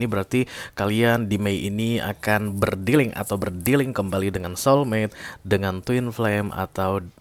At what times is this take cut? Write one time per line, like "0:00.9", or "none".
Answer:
none